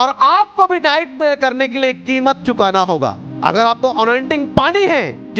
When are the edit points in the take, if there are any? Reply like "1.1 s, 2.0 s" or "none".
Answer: 3.3 s